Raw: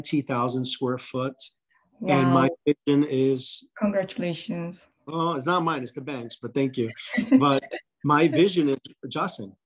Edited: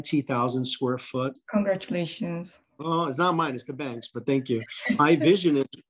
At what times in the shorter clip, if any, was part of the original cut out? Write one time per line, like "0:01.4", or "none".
0:01.4
0:05.0